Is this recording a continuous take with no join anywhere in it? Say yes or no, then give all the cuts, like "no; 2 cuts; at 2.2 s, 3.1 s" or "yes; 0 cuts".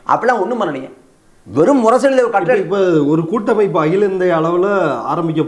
yes; 0 cuts